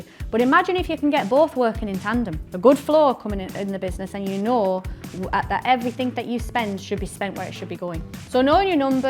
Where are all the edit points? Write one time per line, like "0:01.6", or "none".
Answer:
0:08.1